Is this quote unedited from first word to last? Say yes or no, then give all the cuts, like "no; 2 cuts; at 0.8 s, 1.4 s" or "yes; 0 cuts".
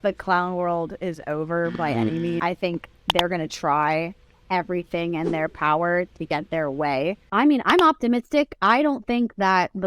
no; 2 cuts; at 2.4 s, 7.2 s